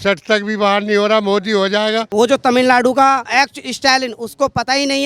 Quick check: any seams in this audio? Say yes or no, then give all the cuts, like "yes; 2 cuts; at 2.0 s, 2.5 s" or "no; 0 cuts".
yes; 2 cuts; at 2.0 s, 3.3 s